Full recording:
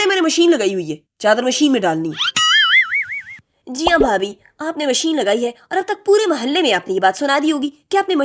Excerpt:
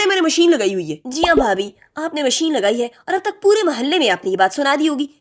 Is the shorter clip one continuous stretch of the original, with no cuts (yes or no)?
no